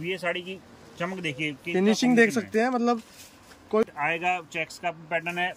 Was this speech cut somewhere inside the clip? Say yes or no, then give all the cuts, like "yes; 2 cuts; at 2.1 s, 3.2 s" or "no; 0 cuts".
yes; 1 cut; at 3.8 s